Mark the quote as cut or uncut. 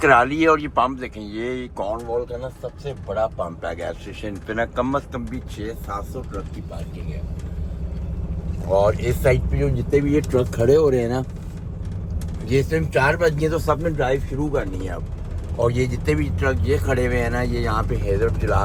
uncut